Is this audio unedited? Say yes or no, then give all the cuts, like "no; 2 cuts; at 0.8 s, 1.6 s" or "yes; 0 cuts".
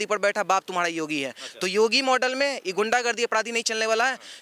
yes; 0 cuts